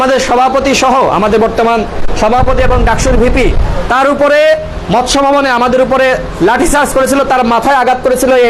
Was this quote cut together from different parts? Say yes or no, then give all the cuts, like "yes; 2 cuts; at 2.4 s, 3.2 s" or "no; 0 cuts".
no; 0 cuts